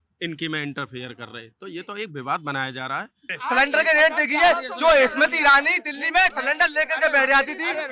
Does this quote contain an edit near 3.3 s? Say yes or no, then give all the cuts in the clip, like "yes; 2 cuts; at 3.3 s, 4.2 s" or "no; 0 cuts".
yes; 1 cut; at 3.3 s